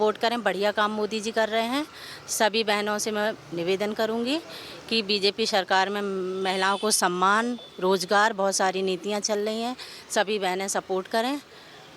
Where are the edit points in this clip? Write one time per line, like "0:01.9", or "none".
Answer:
none